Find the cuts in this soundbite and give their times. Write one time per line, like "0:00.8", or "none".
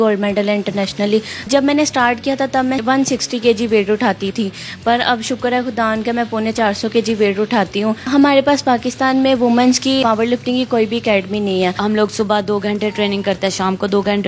0:01.5
0:02.8
0:04.3
0:08.0
0:10.0
0:11.8